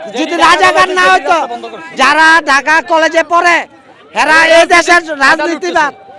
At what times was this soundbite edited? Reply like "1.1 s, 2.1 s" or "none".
none